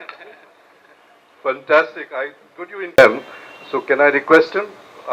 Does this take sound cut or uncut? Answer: cut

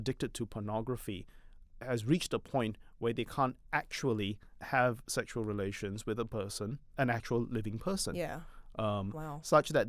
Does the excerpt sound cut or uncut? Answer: cut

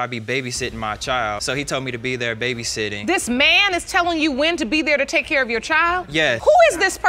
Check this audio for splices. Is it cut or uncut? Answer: uncut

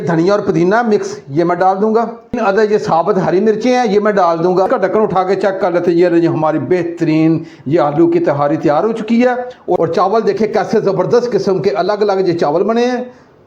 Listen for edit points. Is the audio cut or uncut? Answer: cut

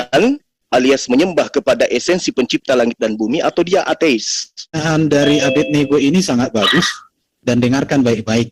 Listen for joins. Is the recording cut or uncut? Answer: cut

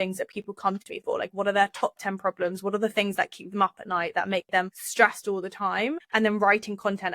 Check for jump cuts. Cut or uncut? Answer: cut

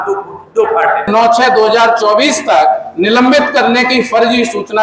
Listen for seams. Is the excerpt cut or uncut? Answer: cut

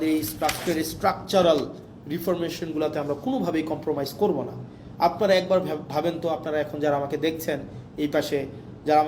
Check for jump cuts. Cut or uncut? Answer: uncut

